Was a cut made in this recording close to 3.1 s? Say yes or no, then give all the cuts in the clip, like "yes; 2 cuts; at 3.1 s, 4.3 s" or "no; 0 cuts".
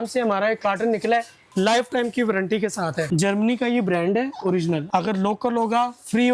yes; 3 cuts; at 1.4 s, 3.1 s, 4.8 s